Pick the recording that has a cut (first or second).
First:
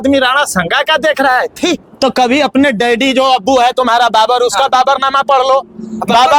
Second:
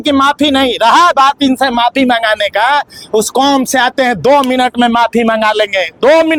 first